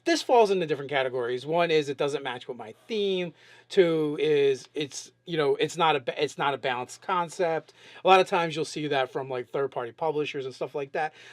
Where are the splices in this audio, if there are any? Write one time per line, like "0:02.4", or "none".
none